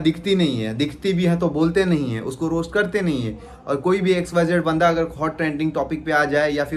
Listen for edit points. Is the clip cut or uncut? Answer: uncut